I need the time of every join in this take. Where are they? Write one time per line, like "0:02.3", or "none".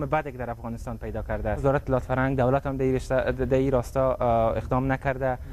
0:02.0